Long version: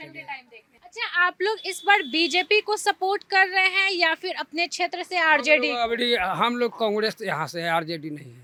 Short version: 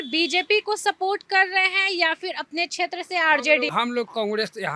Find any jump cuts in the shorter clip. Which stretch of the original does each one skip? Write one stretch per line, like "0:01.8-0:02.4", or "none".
0:05.7-0:06.4